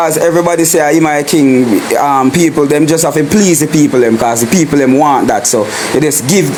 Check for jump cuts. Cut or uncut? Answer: uncut